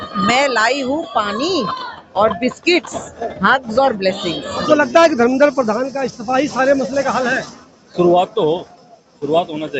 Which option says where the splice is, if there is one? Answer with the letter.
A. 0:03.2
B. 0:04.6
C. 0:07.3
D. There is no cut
B